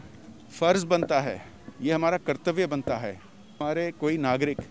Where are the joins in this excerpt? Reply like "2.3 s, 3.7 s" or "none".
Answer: 3.5 s